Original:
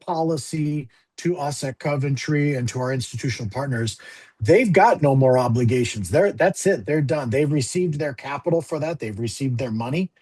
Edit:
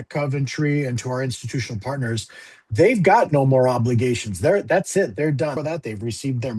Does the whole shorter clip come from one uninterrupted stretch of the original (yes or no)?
no